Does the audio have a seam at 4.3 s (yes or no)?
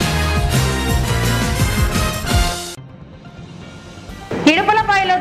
yes